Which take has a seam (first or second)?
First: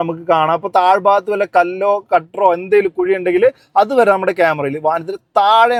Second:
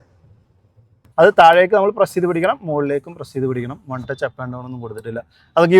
second